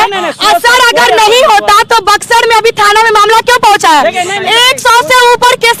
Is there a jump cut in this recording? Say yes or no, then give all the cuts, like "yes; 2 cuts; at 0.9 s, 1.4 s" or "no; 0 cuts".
no; 0 cuts